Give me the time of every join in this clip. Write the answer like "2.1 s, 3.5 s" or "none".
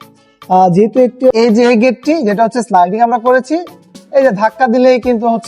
1.3 s